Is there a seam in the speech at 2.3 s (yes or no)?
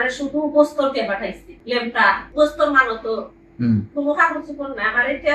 yes